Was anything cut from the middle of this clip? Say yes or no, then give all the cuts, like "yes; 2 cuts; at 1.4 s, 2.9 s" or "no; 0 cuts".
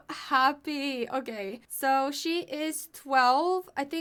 no; 0 cuts